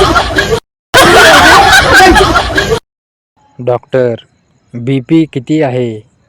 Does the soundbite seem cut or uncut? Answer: cut